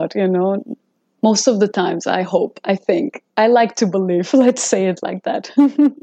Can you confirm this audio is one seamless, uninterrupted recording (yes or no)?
yes